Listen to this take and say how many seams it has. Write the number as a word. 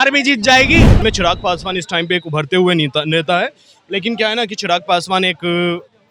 one